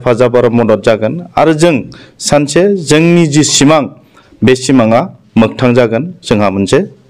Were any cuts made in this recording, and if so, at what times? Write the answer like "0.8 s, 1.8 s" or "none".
none